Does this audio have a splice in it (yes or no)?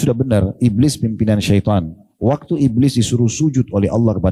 no